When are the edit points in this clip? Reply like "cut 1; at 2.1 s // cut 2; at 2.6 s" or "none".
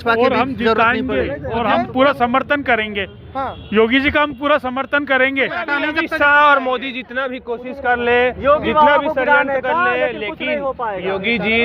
cut 1; at 5.6 s